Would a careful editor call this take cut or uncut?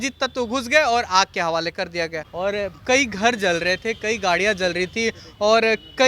cut